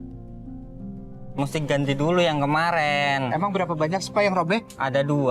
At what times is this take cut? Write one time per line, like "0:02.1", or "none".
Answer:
0:01.3